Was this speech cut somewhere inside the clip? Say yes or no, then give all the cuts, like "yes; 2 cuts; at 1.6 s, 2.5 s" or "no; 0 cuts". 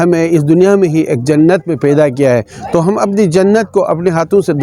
no; 0 cuts